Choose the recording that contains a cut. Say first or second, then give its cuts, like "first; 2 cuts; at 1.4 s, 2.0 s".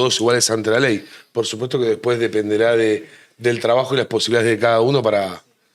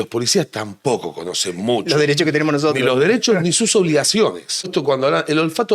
second; 1 cut; at 4.7 s